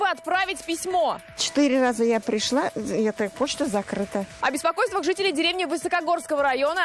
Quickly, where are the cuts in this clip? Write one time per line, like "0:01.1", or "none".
none